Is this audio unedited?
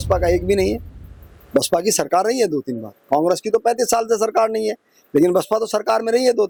yes; 0 cuts

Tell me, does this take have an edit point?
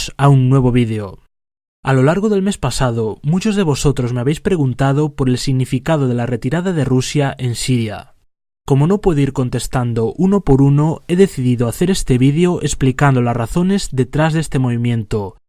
no; 0 cuts

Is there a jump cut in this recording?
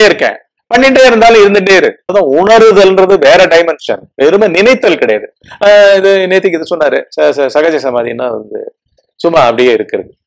yes; 1 cut; at 2.1 s

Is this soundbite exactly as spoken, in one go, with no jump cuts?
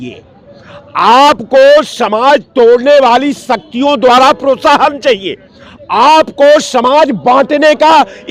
yes; 0 cuts

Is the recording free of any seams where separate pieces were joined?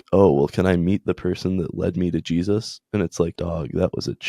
no; 1 cut; at 3.3 s

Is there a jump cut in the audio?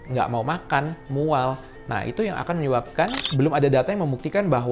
yes; 1 cut; at 3.2 s

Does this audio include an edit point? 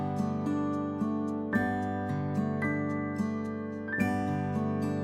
no; 0 cuts

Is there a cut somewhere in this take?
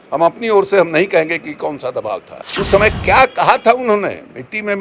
yes; 1 cut; at 2.4 s

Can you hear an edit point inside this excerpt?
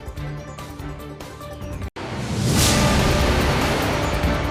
no; 0 cuts

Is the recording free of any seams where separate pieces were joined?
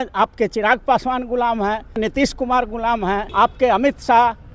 no; 2 cuts; at 2.0 s, 3.3 s

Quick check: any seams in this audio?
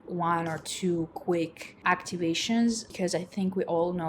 yes; 2 cuts; at 1.7 s, 2.9 s

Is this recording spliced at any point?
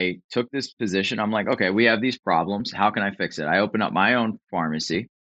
no; 0 cuts

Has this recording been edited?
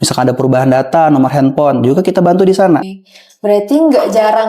yes; 1 cut; at 2.9 s

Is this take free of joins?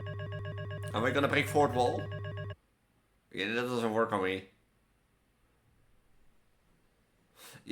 no; 1 cut; at 0.9 s

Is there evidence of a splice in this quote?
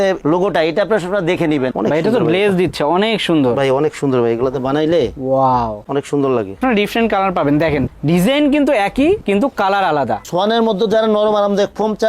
yes; 3 cuts; at 1.7 s, 6.6 s, 10.2 s

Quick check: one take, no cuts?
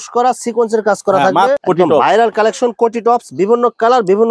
no; 1 cut; at 1.6 s

